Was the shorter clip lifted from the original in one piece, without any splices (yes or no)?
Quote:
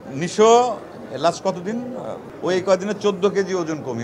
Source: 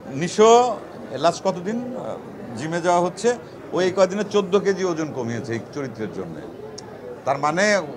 no